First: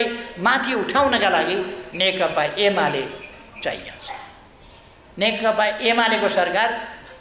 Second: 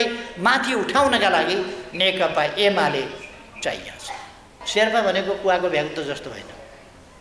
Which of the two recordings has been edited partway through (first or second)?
second